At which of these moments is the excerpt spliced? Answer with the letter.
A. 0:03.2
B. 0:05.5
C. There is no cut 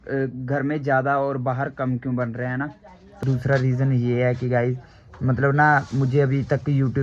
A